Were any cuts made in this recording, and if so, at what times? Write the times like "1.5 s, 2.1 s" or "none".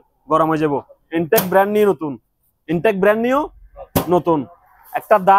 none